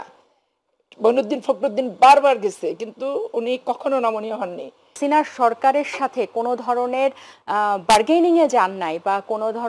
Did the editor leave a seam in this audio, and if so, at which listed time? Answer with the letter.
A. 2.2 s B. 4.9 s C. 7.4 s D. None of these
B